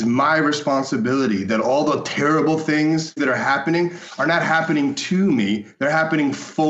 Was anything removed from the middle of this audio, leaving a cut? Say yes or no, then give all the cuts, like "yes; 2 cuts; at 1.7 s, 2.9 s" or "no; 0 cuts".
yes; 1 cut; at 3.2 s